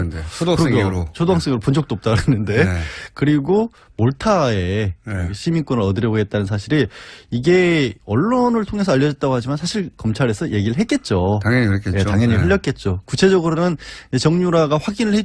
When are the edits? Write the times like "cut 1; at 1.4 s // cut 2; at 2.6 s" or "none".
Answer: none